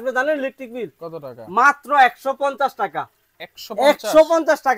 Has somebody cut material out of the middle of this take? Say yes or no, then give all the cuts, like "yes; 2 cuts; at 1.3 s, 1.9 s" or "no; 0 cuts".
no; 0 cuts